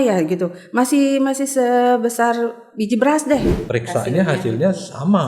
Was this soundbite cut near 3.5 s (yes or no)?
yes